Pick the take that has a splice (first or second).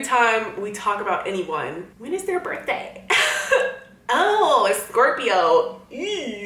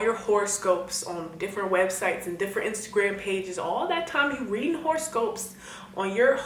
first